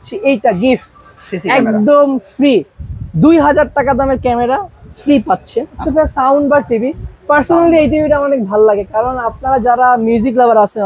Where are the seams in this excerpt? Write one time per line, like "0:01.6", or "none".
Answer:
0:05.8